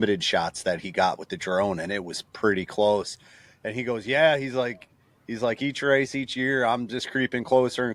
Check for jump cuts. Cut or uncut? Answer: uncut